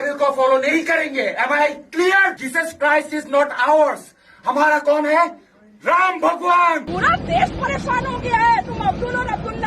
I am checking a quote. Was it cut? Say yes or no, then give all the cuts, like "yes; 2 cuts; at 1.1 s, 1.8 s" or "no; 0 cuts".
yes; 2 cuts; at 2.4 s, 6.9 s